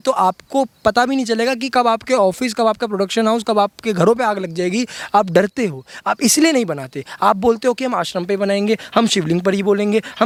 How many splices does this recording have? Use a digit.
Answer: 0